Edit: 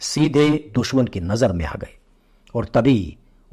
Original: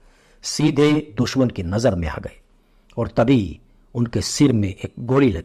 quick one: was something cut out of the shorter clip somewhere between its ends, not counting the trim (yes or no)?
no